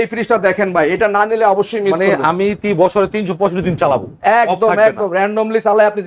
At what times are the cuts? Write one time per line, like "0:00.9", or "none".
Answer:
none